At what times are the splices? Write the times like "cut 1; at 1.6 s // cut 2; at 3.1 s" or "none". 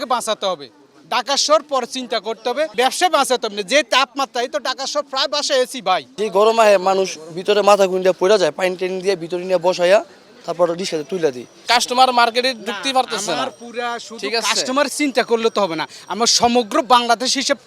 cut 1; at 2.7 s // cut 2; at 6.1 s // cut 3; at 11.7 s